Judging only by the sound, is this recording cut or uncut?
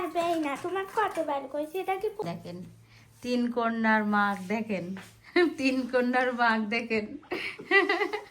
cut